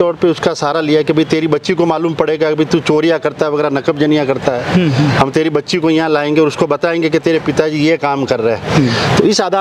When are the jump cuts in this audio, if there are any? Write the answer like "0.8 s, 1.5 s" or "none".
none